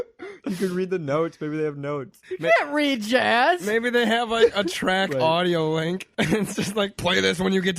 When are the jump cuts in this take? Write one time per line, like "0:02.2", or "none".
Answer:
0:02.2